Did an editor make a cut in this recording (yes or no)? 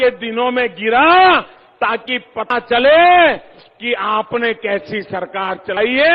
no